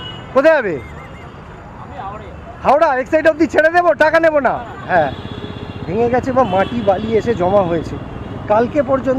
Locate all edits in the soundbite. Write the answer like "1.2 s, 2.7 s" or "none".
4.8 s